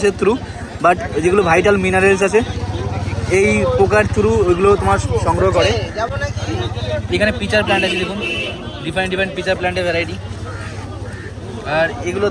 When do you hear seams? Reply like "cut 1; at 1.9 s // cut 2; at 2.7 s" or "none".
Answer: none